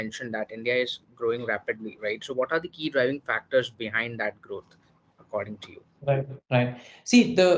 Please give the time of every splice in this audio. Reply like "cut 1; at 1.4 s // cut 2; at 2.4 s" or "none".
none

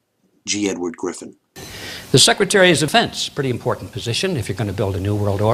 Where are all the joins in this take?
none

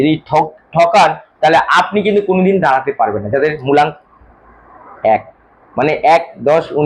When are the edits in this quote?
none

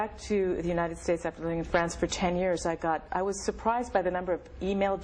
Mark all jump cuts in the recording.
none

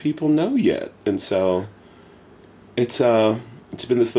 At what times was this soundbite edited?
none

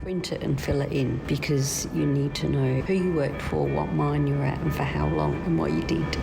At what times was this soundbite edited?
cut 1; at 1.2 s // cut 2; at 2.8 s

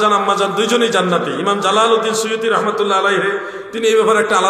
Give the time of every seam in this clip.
none

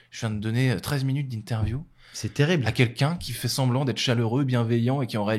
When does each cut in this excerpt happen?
none

